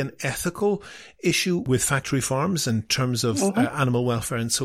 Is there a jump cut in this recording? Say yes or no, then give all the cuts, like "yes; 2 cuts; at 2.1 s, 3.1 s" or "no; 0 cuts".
yes; 1 cut; at 1.6 s